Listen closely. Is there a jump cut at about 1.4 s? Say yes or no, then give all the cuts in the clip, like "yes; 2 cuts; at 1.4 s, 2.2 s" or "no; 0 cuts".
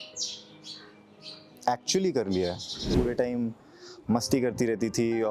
no; 1 cut; at 2.9 s